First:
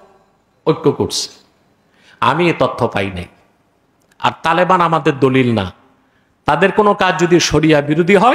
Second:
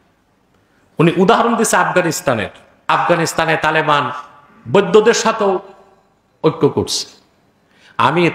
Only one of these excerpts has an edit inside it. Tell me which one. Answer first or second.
second